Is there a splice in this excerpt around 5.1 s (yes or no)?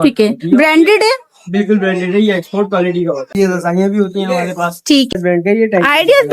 yes